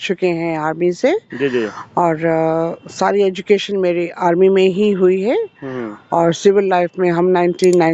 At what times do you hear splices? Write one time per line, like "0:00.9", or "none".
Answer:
none